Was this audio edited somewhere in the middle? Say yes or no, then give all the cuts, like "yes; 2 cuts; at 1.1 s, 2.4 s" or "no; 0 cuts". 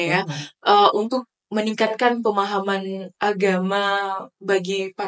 no; 0 cuts